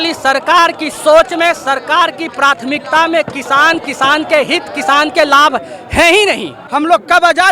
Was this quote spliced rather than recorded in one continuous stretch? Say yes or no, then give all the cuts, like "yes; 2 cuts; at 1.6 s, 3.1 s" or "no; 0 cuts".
yes; 1 cut; at 6.5 s